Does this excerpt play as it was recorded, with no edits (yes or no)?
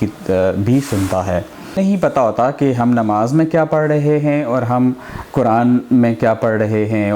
no